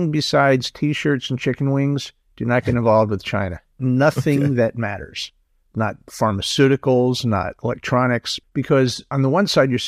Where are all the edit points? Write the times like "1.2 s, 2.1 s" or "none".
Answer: 3.8 s, 8.6 s